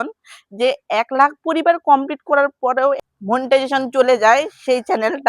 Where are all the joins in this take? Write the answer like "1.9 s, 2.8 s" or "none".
3.0 s